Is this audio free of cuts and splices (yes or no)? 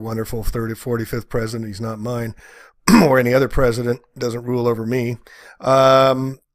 no